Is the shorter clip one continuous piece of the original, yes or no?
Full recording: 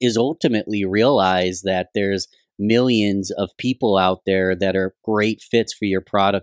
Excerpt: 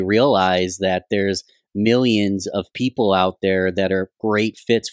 yes